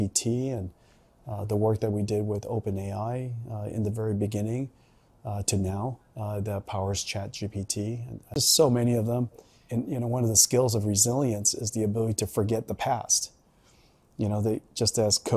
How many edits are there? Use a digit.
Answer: 1